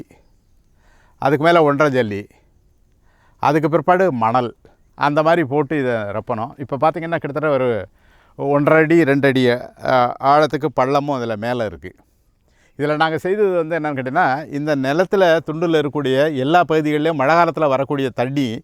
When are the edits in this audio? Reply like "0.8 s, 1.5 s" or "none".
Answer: none